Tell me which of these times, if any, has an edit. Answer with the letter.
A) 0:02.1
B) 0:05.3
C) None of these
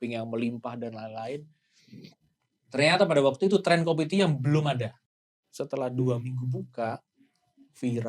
B